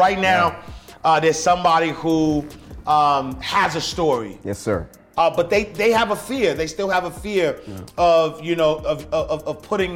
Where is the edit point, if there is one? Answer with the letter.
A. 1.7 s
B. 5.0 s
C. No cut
B